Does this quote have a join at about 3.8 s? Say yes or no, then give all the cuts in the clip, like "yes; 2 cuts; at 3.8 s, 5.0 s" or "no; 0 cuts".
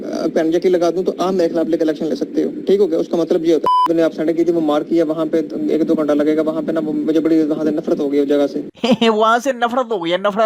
yes; 1 cut; at 3.8 s